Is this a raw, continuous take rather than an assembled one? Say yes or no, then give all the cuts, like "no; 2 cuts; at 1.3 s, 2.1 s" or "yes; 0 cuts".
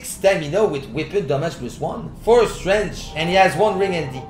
yes; 0 cuts